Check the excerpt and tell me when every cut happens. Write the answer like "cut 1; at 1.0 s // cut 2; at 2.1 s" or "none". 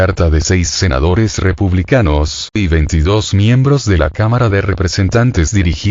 none